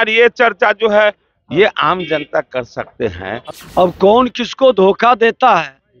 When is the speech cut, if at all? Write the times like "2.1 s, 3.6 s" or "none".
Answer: 3.5 s